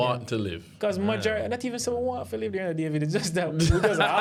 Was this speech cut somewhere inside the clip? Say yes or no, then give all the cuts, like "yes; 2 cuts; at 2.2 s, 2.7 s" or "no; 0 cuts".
no; 0 cuts